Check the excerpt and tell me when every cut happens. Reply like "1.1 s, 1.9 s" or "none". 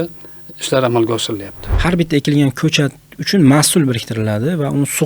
1.6 s